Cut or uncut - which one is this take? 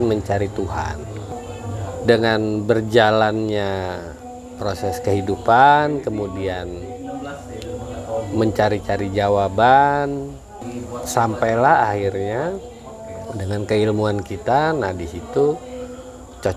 cut